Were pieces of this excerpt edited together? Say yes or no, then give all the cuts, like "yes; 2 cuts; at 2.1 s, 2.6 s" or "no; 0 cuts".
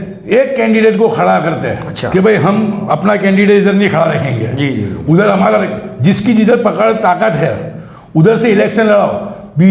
no; 0 cuts